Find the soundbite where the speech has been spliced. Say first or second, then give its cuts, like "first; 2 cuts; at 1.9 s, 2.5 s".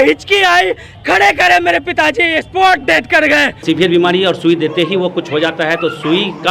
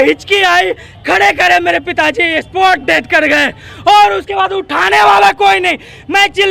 first; 1 cut; at 3.6 s